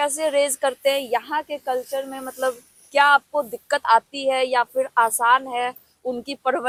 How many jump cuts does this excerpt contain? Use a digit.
0